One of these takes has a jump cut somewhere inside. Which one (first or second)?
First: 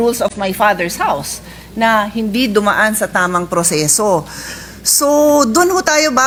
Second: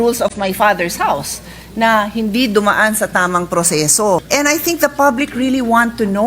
second